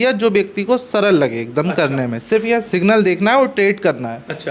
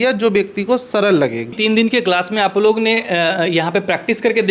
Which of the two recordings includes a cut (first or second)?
second